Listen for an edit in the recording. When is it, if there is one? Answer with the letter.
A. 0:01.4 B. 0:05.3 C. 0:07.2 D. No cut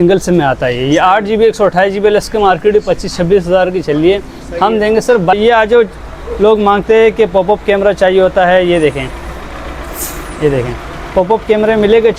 B